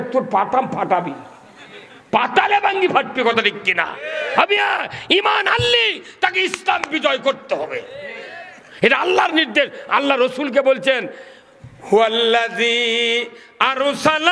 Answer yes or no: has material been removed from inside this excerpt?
no